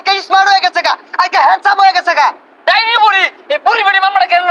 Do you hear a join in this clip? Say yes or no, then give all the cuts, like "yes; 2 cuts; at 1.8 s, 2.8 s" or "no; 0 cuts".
yes; 1 cut; at 2.5 s